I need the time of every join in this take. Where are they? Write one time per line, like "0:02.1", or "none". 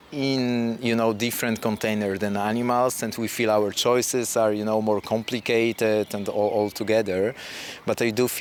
none